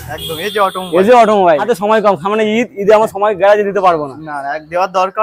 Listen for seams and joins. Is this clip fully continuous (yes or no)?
no